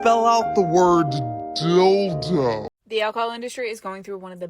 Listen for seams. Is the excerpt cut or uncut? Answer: cut